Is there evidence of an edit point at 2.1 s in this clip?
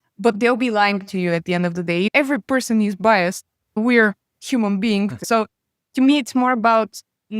yes; 2 cuts; at 2.1 s, 5.2 s

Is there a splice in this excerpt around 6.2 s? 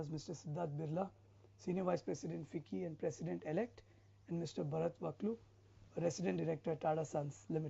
yes; 1 cut; at 6.2 s

